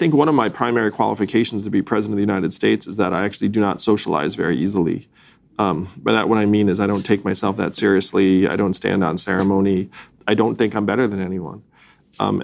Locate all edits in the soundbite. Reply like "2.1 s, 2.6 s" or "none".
none